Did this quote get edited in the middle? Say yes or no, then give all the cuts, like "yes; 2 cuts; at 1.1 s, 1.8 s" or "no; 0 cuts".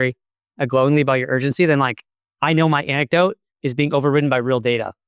no; 0 cuts